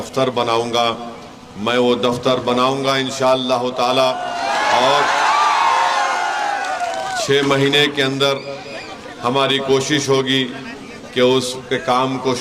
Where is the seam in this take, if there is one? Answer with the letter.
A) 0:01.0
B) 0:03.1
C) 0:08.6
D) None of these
D